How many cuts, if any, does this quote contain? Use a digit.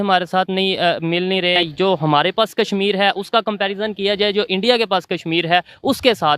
1